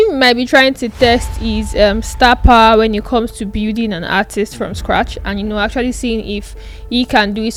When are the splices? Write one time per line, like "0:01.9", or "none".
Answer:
none